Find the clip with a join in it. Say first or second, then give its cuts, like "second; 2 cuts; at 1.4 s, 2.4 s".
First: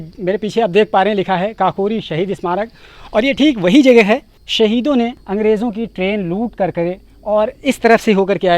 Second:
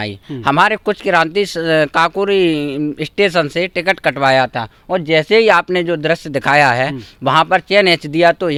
first; 2 cuts; at 4.4 s, 5.2 s